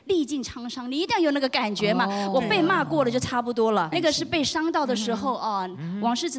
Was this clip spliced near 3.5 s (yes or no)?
no